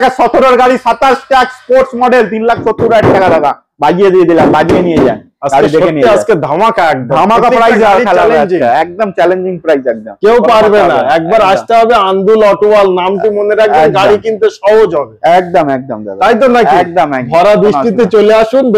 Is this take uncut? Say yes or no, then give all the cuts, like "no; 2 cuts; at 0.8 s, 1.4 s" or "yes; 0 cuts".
yes; 0 cuts